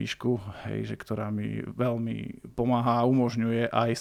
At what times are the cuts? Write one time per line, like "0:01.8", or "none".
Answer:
none